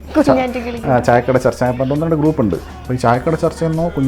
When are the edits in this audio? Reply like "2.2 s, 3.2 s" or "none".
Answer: 2.7 s